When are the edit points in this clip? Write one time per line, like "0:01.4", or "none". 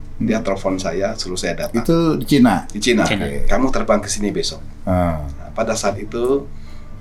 none